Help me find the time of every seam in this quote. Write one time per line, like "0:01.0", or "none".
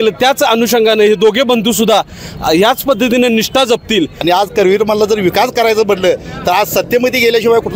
0:04.2